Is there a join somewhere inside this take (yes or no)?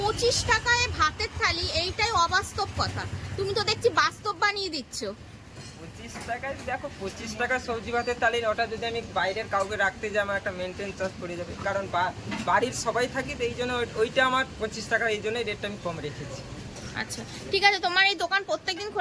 no